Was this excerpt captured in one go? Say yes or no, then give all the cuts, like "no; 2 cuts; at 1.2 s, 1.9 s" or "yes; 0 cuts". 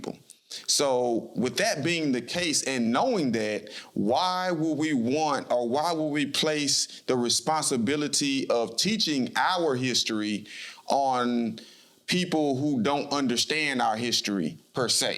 yes; 0 cuts